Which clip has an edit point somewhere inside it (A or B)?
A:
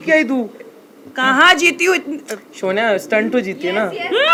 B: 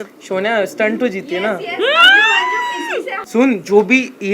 B